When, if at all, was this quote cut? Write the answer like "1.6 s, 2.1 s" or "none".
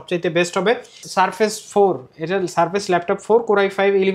1.1 s